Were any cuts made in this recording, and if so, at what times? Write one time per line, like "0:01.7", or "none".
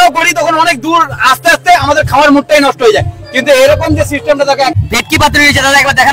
0:04.8